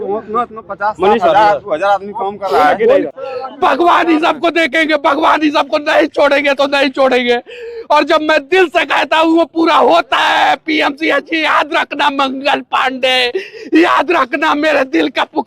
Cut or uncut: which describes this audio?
cut